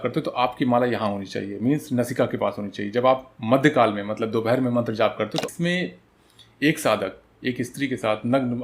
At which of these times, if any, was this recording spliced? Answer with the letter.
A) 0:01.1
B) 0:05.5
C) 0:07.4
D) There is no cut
B